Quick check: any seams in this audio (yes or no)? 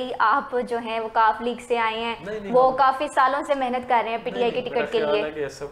no